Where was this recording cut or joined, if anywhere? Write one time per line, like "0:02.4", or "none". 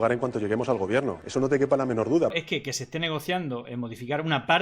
0:01.2
0:02.3